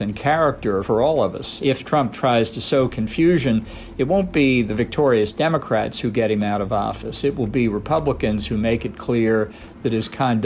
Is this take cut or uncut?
cut